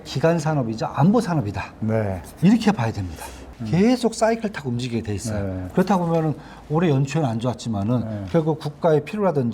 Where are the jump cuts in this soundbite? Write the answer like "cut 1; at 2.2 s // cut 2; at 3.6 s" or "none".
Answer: cut 1; at 3.6 s